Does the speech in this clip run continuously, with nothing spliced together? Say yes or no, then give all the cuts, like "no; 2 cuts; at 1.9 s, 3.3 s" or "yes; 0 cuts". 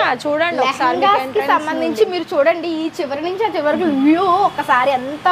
yes; 0 cuts